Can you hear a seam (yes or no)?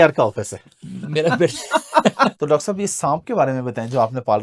yes